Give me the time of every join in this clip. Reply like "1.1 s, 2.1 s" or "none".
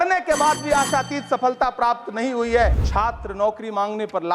2.8 s